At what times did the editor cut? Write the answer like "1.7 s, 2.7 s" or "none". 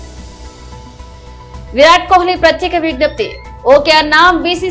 1.2 s